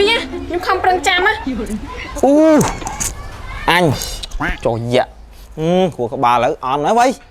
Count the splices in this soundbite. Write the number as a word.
one